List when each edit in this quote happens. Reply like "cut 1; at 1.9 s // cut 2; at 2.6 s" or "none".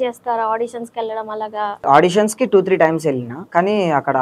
cut 1; at 1.8 s // cut 2; at 3.3 s